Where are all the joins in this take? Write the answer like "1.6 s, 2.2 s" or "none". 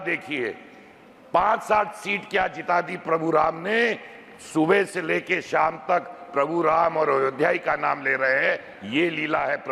none